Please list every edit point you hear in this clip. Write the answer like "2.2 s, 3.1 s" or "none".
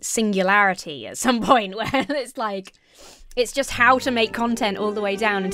none